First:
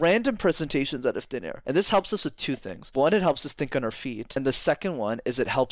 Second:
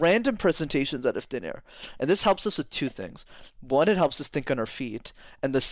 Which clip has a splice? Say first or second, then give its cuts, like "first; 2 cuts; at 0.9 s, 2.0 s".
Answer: first; 3 cuts; at 1.5 s, 2.7 s, 4.2 s